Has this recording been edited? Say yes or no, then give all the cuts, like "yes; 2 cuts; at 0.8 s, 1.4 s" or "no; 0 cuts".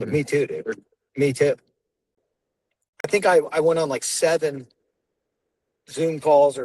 yes; 1 cut; at 2.1 s